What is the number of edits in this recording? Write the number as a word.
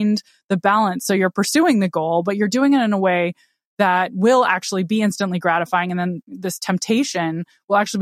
one